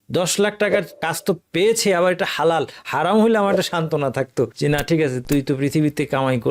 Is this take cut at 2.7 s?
no; 2 cuts; at 1.0 s, 4.5 s

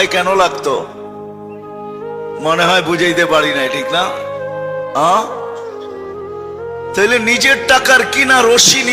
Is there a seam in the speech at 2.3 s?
no; 2 cuts; at 5.4 s, 7.0 s

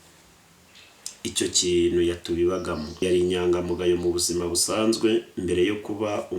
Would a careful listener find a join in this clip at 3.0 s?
yes; 1 cut; at 3.0 s

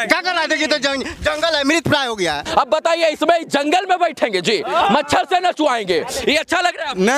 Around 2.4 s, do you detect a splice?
yes; 1 cut; at 2.4 s

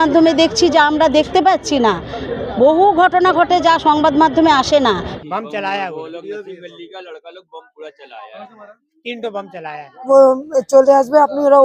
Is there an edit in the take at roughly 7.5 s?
no; 2 cuts; at 5.1 s, 10.1 s

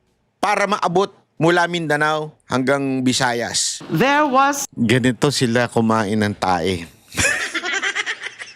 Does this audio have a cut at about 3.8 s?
yes; 1 cut; at 3.8 s

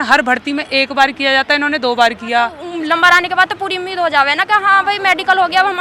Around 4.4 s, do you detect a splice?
no; 1 cut; at 2.6 s

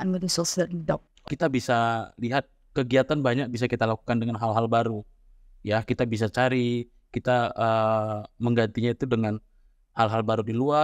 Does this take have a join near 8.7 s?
no; 1 cut; at 1.2 s

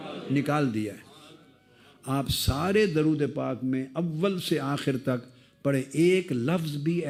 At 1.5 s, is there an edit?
no; 0 cuts

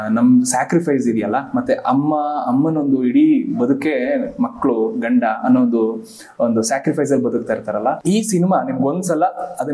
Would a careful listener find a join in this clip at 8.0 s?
yes; 1 cut; at 8.0 s

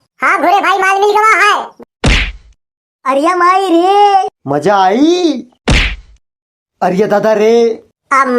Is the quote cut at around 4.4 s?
no; 1 cut; at 1.7 s

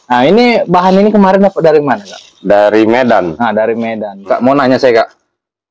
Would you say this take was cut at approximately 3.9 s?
yes; 1 cut; at 3.9 s

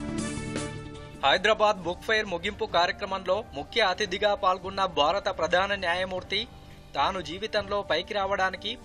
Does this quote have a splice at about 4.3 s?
no; 1 cut; at 1.0 s

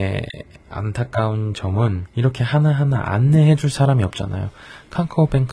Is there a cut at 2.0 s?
yes; 1 cut; at 2.0 s

